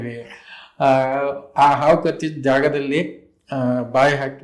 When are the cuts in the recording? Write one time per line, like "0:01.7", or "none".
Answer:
none